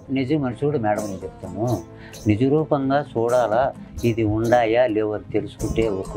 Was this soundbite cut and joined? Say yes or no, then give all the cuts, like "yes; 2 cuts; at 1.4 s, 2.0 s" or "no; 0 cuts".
no; 0 cuts